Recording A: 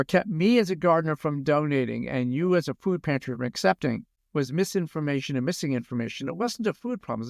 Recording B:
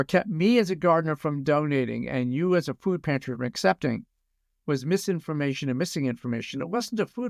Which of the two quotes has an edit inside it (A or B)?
A